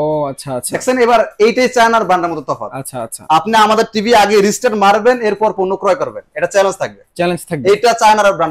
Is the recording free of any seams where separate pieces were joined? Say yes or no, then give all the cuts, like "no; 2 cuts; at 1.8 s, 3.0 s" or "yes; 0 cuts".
yes; 0 cuts